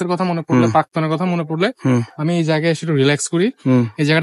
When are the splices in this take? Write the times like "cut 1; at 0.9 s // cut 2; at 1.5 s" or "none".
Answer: none